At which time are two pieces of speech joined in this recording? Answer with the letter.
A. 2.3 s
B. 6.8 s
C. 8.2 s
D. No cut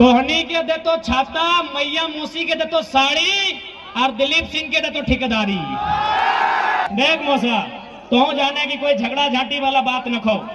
B